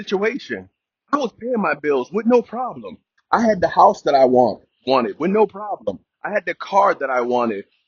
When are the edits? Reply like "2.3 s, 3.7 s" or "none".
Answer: none